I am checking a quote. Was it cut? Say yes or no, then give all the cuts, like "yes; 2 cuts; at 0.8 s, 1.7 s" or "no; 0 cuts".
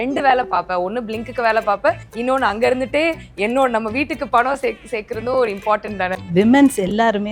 yes; 1 cut; at 6.2 s